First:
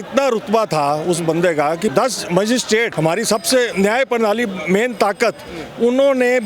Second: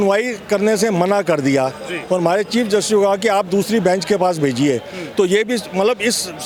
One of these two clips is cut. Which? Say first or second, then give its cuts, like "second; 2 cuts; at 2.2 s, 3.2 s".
first; 3 cuts; at 1.9 s, 2.9 s, 3.7 s